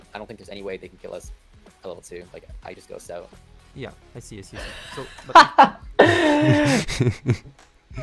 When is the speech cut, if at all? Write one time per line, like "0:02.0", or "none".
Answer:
none